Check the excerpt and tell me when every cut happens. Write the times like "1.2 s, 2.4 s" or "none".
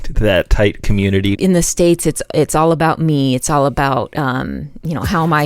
1.3 s